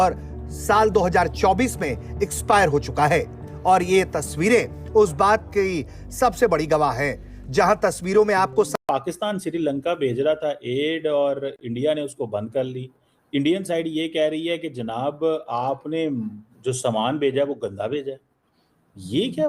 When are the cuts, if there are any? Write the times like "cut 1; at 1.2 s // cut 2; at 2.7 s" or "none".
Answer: cut 1; at 8.7 s